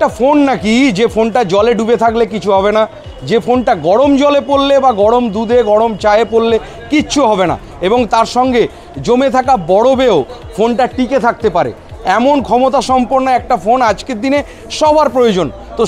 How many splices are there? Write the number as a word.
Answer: zero